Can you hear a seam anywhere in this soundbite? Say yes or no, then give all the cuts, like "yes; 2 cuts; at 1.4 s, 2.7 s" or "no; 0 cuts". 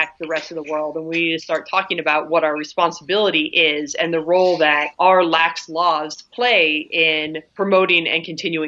no; 0 cuts